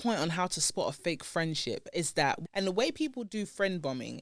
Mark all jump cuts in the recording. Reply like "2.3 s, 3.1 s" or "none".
2.4 s